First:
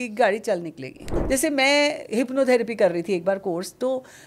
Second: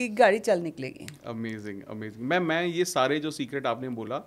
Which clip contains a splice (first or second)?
first